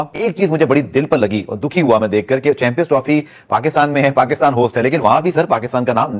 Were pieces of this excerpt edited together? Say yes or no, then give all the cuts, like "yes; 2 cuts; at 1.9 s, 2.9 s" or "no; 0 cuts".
no; 0 cuts